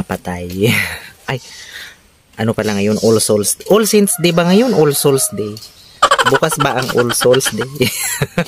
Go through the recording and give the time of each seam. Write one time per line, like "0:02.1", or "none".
none